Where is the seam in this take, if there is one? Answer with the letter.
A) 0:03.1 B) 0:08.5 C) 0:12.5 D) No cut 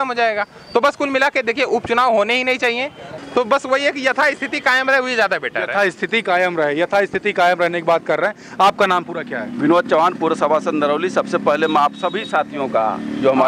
A